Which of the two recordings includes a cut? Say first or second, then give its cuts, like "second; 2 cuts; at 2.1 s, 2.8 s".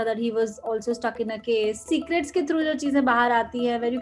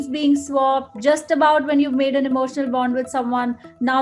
first; 1 cut; at 1.8 s